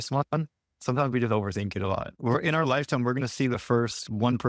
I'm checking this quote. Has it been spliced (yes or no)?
yes